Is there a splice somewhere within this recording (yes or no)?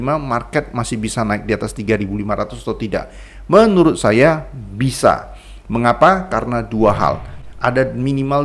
yes